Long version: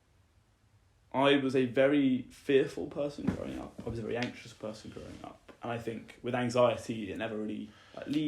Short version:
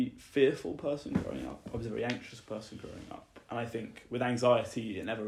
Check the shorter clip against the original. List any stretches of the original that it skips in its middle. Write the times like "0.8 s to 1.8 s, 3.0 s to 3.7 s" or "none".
none